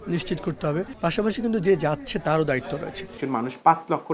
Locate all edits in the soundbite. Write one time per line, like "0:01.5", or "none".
0:00.9
0:03.2